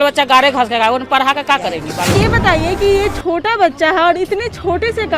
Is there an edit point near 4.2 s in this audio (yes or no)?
no